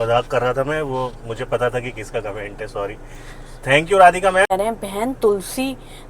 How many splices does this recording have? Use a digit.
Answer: 1